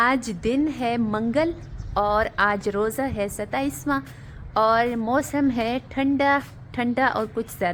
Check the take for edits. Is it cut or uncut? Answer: uncut